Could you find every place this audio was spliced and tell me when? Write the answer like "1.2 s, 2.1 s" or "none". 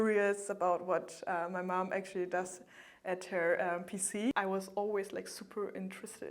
4.3 s